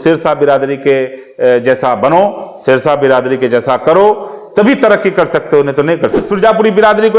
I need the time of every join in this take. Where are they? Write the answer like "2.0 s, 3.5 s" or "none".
6.3 s